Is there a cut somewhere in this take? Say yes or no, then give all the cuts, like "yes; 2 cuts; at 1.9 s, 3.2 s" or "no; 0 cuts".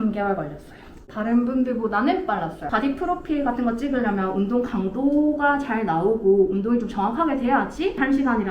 no; 0 cuts